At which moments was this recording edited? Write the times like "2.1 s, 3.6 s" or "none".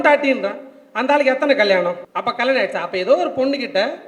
2.1 s